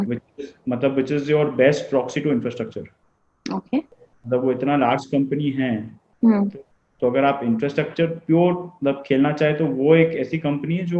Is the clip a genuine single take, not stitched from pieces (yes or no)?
yes